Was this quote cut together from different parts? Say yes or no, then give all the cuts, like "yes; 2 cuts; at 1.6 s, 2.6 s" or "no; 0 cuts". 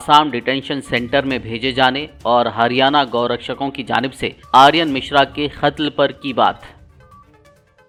no; 0 cuts